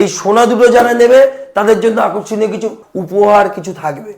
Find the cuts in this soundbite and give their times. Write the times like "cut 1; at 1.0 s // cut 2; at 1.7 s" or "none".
cut 1; at 2.8 s